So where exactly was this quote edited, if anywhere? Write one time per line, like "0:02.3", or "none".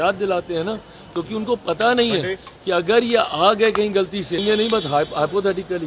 0:04.4